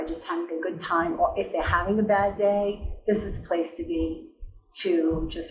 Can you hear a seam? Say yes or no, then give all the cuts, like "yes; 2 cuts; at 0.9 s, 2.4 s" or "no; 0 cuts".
no; 0 cuts